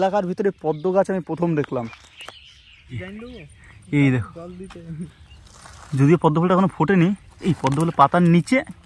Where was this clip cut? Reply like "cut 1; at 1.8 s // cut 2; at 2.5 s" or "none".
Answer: cut 1; at 3.0 s